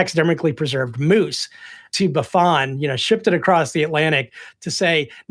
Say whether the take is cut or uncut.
uncut